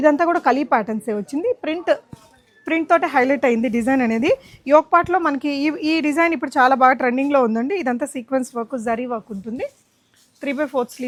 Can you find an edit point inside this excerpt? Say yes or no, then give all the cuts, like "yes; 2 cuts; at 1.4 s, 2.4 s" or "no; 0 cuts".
no; 0 cuts